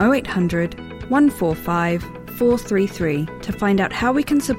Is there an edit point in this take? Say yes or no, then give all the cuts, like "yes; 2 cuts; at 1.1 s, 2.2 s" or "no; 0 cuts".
no; 0 cuts